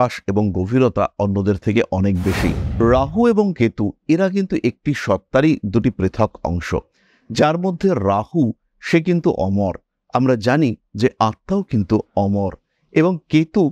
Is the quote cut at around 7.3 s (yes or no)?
no